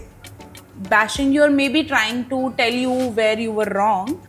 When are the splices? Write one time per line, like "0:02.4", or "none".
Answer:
none